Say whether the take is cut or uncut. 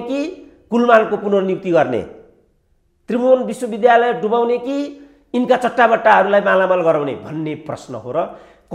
uncut